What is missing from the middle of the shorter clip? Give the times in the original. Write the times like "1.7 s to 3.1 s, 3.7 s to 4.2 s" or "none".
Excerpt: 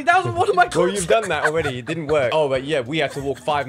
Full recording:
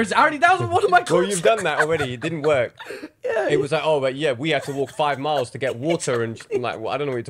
2.7 s to 3.8 s